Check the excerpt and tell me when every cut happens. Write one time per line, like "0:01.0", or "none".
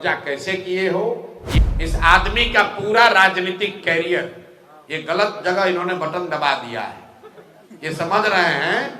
0:01.4